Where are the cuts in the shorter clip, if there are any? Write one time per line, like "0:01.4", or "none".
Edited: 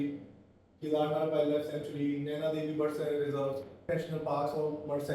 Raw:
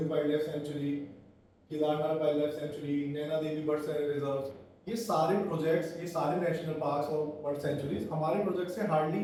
0:03.9